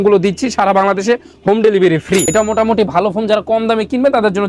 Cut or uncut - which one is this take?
cut